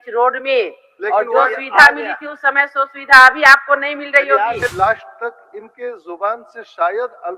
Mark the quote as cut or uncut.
cut